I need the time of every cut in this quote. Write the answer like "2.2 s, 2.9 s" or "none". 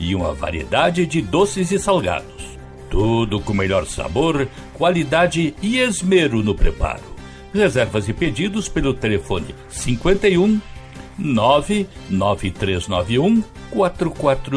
none

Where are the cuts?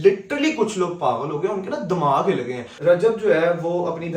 2.7 s

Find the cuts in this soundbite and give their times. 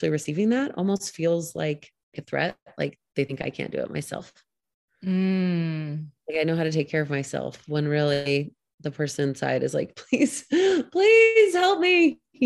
2.2 s

